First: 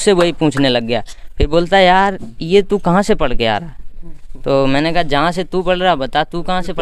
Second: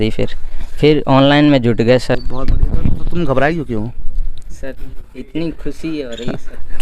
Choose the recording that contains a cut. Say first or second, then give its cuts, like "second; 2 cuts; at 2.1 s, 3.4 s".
second; 1 cut; at 2.4 s